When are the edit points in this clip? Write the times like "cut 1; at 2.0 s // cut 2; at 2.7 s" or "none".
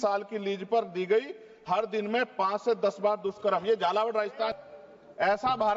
cut 1; at 4.5 s